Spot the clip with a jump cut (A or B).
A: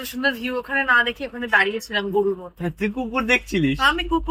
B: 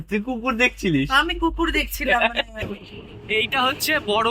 B